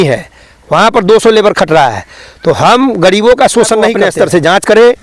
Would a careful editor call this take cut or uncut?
cut